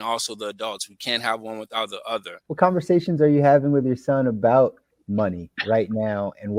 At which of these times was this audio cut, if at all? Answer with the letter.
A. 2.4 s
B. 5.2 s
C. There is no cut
A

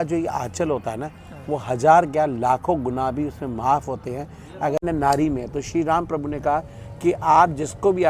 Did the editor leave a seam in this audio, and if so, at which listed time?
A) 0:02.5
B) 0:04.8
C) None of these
B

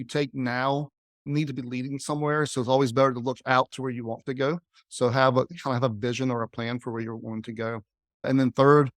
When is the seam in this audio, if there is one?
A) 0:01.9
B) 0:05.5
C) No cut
B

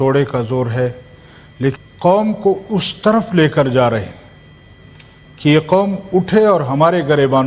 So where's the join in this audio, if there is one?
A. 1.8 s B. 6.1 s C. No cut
A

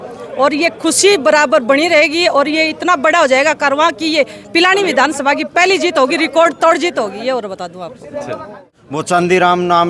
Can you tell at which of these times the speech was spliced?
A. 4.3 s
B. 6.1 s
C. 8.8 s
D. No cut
C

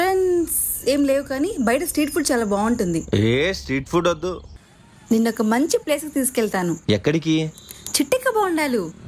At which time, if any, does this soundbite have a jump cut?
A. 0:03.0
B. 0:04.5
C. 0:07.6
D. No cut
B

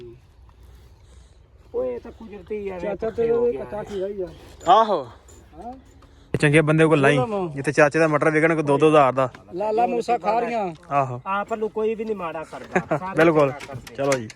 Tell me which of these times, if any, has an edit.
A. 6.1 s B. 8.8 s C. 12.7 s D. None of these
A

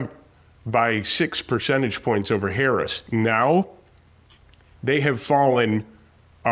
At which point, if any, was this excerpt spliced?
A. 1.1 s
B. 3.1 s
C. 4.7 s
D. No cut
D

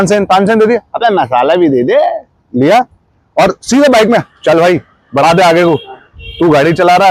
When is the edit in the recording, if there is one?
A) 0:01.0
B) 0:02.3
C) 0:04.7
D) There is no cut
D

